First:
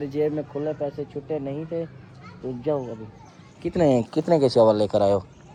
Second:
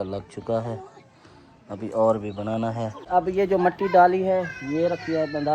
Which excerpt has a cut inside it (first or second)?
second